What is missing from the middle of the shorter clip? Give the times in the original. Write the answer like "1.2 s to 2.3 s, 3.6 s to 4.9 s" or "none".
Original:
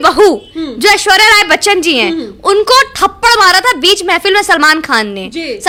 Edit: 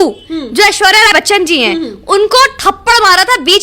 1.4 s to 1.5 s